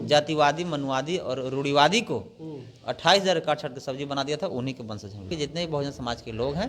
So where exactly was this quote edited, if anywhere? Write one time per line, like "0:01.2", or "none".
0:05.3